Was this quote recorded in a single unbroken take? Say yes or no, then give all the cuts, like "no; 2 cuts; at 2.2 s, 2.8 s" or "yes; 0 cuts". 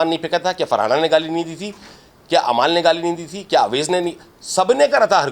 yes; 0 cuts